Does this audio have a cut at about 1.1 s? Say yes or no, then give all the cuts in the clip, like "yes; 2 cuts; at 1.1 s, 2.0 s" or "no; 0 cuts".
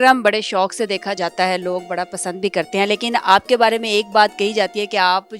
yes; 1 cut; at 1.1 s